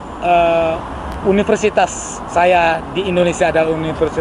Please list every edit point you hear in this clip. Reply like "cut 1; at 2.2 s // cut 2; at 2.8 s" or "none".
cut 1; at 1.0 s